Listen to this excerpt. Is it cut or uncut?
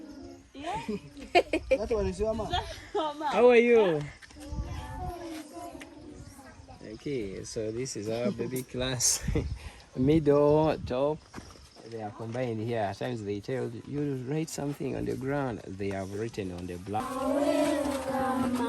cut